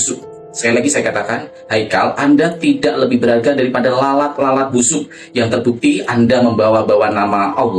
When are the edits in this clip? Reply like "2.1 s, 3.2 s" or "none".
none